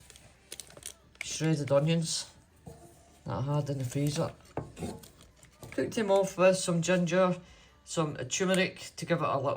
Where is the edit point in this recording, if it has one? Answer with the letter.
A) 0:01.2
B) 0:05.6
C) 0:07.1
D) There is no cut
B